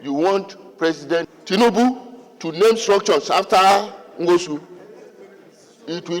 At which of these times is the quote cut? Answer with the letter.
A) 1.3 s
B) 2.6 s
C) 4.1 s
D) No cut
A